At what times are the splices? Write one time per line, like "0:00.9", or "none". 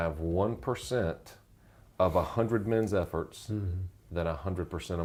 none